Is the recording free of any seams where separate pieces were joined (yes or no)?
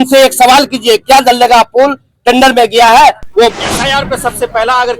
no